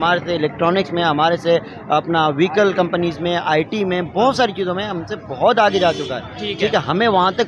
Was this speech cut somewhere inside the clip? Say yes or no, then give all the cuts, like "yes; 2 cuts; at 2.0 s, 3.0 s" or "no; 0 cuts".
no; 0 cuts